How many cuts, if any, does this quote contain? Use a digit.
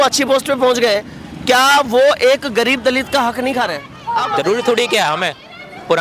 1